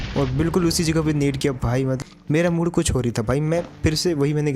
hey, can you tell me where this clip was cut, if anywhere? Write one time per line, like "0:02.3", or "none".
0:02.0